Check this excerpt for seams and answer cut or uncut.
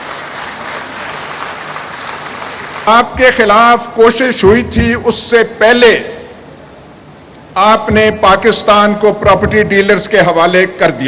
cut